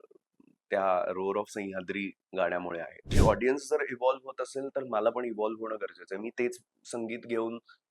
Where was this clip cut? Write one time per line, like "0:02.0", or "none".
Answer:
0:03.1